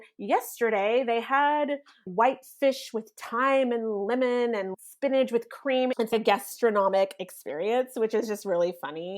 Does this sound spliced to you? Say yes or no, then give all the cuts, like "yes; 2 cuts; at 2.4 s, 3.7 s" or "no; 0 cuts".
yes; 2 cuts; at 4.7 s, 6.0 s